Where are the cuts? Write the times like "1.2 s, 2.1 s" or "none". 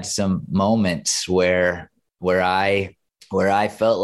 none